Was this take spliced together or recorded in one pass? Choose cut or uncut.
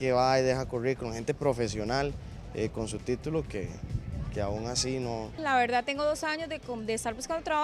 cut